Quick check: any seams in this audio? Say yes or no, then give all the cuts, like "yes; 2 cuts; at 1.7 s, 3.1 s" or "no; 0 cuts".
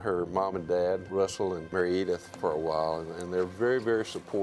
yes; 1 cut; at 1.1 s